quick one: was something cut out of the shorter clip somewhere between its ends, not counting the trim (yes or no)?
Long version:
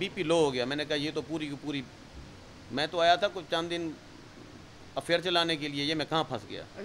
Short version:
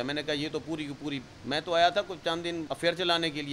yes